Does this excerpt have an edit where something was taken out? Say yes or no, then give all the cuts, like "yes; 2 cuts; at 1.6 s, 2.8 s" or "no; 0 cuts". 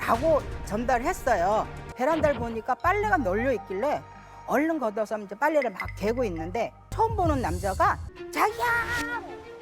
yes; 3 cuts; at 1.8 s, 6.8 s, 8.1 s